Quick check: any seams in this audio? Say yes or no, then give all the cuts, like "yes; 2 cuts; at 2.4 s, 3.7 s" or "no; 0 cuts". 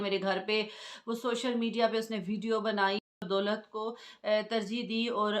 yes; 1 cut; at 3.1 s